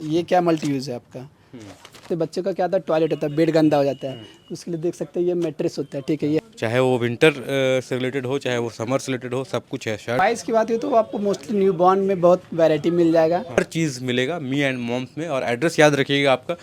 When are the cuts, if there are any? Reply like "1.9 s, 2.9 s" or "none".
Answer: 2.0 s, 6.4 s, 10.2 s, 13.6 s

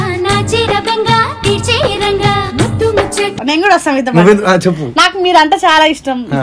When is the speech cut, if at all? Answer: 3.3 s

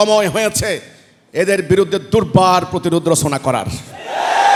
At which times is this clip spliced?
none

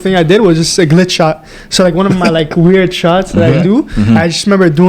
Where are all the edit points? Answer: none

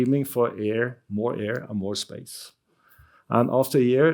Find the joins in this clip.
none

